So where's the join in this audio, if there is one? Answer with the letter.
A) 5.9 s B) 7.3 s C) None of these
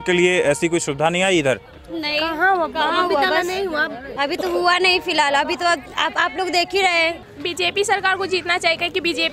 B